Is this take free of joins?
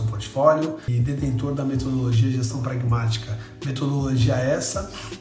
no; 1 cut; at 0.9 s

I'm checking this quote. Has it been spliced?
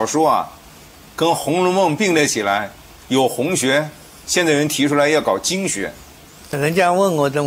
yes; 1 cut; at 6.6 s

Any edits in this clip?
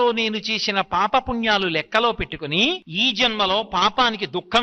yes; 1 cut; at 2.9 s

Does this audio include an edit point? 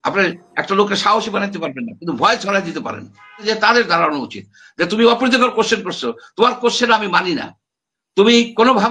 yes; 1 cut; at 3.4 s

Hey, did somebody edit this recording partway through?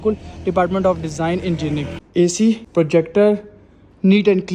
yes; 2 cuts; at 2.0 s, 2.6 s

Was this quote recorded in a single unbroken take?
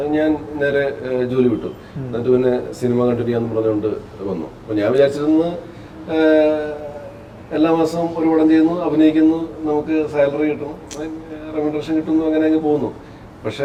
yes; 0 cuts

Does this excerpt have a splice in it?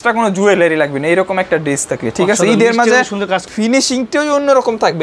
yes; 1 cut; at 3.5 s

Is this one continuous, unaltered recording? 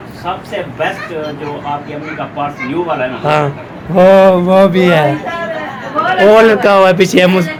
yes; 0 cuts

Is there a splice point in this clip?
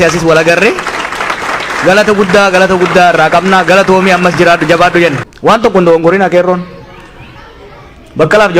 yes; 1 cut; at 5.3 s

